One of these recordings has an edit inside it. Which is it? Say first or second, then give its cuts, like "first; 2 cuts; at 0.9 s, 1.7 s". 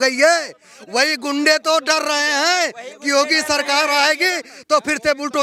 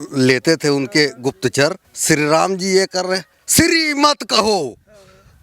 second; 1 cut; at 1.9 s